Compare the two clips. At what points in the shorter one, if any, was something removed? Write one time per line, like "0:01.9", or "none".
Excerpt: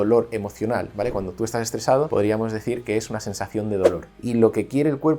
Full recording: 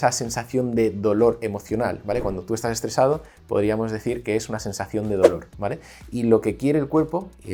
0:02.1
0:04.1